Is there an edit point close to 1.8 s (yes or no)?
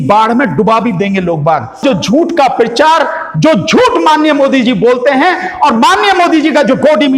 yes